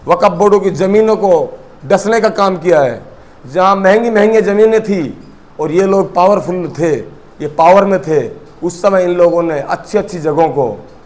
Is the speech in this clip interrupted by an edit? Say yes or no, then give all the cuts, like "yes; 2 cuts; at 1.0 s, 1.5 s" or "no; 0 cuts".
no; 0 cuts